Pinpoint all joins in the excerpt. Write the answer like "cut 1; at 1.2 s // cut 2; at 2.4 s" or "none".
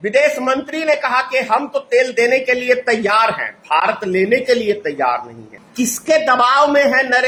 none